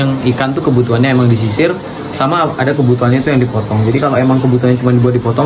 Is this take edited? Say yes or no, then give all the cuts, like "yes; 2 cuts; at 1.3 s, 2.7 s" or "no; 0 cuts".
no; 0 cuts